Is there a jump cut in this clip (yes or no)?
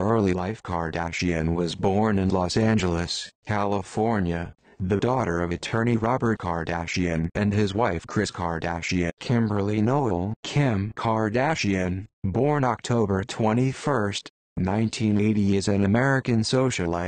no